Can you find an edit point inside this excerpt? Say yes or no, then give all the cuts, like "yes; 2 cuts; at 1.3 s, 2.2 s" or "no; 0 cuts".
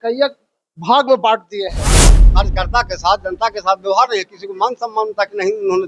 yes; 1 cut; at 2.2 s